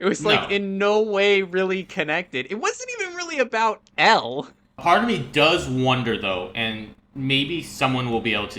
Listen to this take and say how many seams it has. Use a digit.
1